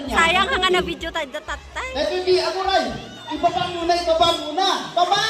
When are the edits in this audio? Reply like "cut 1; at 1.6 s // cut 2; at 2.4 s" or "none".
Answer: none